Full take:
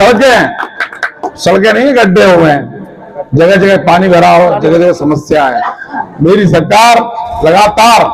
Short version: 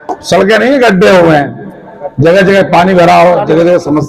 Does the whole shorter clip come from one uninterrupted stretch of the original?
yes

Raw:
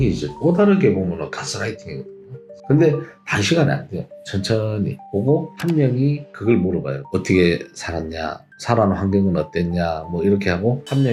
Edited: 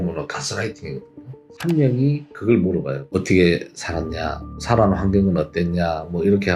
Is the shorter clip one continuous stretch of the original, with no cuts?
no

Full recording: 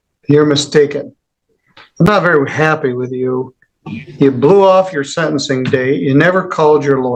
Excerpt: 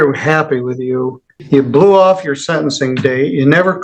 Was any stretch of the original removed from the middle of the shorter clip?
yes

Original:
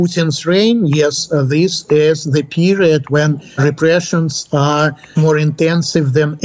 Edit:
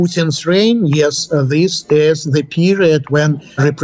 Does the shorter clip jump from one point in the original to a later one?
no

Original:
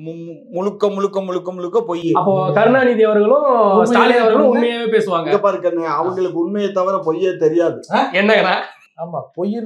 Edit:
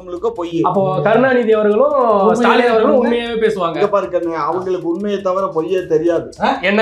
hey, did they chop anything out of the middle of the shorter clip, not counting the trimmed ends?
no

